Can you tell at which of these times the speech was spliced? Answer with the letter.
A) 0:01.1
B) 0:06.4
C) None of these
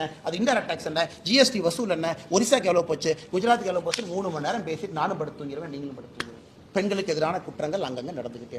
C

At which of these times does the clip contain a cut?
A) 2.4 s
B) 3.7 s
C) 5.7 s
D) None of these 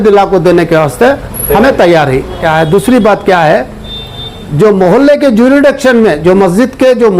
A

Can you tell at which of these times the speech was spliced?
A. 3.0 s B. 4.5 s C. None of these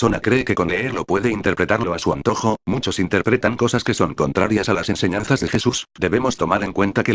B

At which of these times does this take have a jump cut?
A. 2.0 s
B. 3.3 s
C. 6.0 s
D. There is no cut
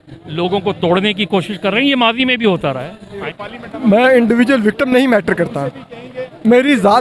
B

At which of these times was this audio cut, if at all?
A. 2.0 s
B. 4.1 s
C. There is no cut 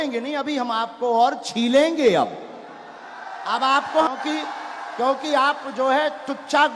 B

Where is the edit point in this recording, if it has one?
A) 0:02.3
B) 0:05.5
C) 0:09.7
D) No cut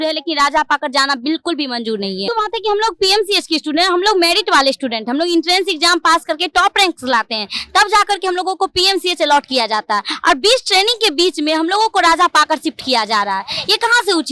A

